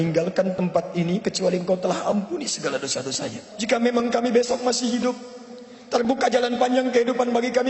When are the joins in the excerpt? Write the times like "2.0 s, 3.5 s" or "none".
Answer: 3.5 s